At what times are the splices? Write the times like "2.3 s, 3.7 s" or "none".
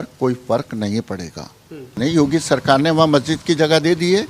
2.0 s